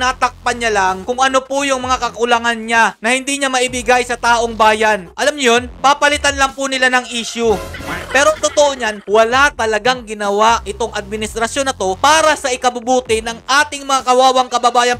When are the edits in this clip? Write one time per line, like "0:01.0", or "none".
none

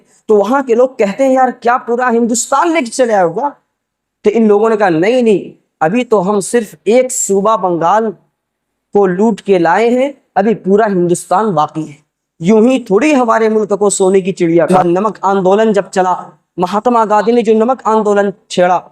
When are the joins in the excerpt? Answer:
0:14.7

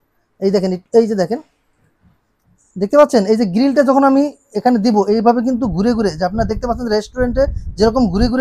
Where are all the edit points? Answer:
none

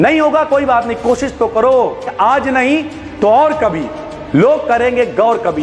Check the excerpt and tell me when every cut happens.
0:02.1

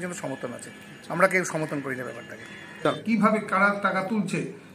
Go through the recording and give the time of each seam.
0:02.9

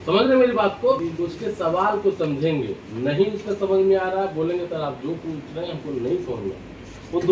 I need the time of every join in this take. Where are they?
none

